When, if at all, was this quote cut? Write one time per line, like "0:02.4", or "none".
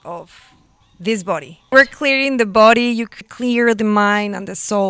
0:01.7
0:03.2